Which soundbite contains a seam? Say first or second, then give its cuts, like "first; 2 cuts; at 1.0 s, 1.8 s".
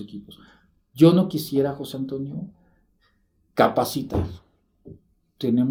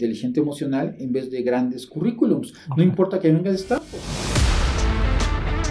second; 1 cut; at 3.8 s